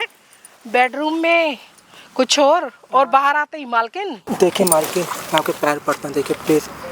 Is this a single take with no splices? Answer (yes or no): no